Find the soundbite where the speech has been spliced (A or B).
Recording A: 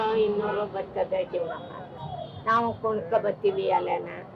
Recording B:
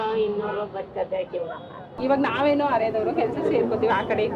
B